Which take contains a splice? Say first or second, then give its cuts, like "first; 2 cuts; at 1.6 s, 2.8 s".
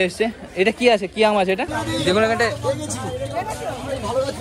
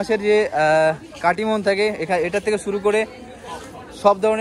first; 1 cut; at 1.7 s